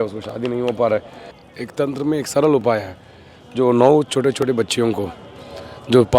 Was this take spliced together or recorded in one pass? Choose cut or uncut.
uncut